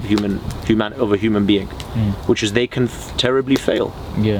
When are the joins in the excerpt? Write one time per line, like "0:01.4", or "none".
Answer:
none